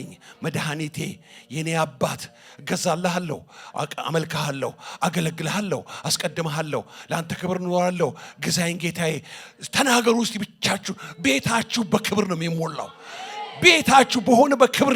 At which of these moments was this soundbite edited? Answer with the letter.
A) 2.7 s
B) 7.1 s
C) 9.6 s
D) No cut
D